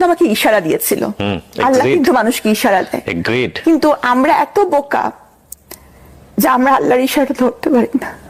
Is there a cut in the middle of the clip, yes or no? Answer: no